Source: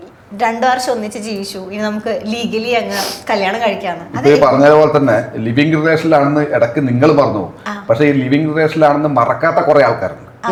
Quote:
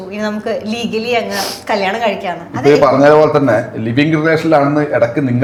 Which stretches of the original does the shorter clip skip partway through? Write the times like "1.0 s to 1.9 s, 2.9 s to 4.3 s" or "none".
none